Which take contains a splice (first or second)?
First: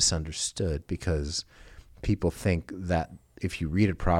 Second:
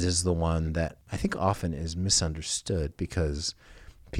second